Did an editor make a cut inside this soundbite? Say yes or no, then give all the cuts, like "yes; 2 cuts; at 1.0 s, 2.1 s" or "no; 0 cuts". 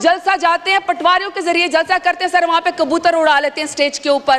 no; 0 cuts